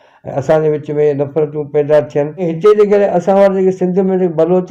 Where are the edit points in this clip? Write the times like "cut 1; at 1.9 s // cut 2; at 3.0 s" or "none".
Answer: cut 1; at 2.5 s